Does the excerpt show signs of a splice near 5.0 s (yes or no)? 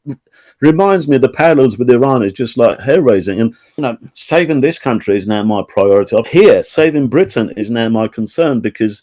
no